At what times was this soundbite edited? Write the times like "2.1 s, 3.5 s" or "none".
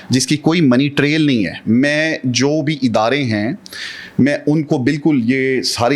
none

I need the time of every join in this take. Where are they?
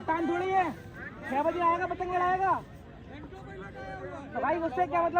none

